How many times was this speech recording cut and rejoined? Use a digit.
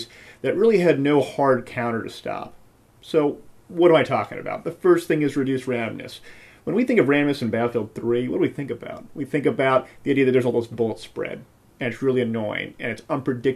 1